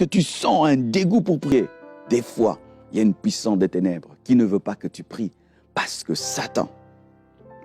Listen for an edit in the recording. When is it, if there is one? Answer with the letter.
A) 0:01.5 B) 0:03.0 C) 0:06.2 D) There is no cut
A